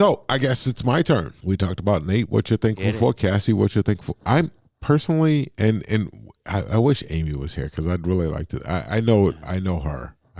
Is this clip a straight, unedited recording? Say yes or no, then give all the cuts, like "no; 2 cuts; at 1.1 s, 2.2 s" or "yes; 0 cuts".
no; 1 cut; at 1.3 s